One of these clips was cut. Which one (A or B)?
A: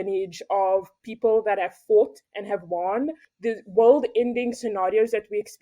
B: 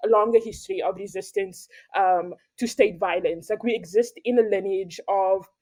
A